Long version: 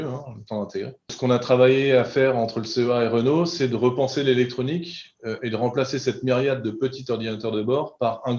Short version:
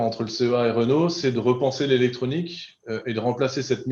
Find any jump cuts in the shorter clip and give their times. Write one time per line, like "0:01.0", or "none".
none